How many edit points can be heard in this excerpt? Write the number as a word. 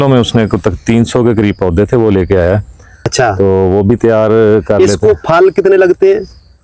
one